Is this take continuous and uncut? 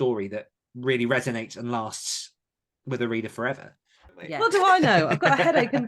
no; 1 cut; at 4.2 s

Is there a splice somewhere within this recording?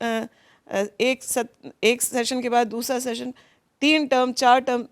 no; 0 cuts

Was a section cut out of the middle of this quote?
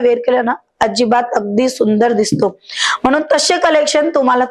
no; 0 cuts

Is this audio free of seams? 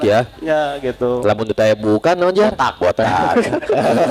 yes; 0 cuts

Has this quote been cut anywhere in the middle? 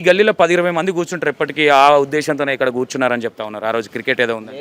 no; 0 cuts

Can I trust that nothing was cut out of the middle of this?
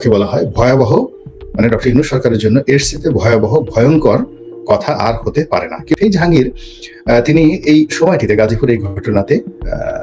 no; 1 cut; at 6.0 s

